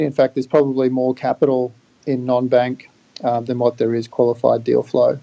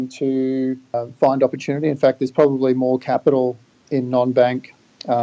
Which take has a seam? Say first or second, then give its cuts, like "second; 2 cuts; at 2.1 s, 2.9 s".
second; 1 cut; at 0.9 s